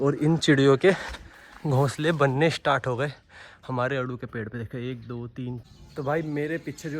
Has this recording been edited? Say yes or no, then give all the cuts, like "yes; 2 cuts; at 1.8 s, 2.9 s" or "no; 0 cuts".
yes; 1 cut; at 5.6 s